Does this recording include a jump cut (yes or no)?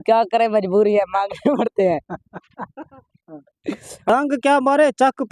yes